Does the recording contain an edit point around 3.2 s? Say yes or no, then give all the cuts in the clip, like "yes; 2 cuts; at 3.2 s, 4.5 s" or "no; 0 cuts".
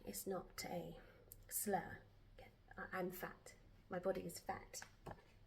no; 0 cuts